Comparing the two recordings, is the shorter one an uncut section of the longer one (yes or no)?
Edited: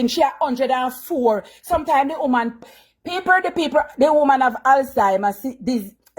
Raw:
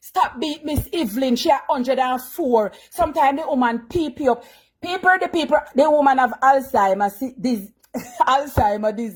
no